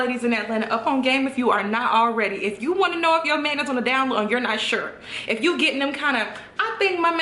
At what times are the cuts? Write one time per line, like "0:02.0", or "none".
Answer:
none